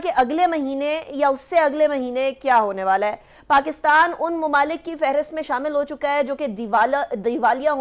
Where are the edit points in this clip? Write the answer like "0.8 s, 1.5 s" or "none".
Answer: none